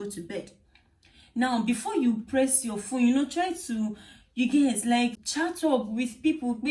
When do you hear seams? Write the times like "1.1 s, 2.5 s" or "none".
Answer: 5.2 s